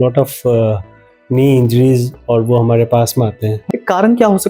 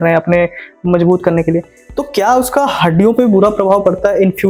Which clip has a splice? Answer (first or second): first